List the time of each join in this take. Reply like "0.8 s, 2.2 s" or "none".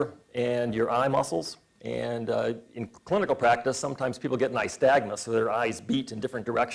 4.7 s